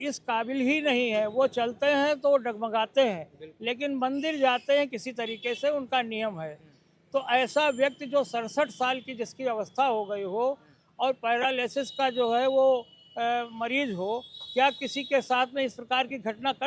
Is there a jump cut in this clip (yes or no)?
no